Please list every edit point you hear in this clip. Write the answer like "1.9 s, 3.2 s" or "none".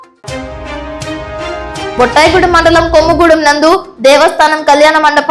2.0 s